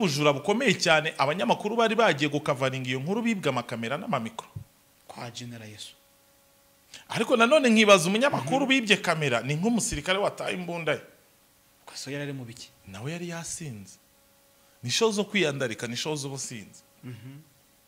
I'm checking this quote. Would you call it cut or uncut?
uncut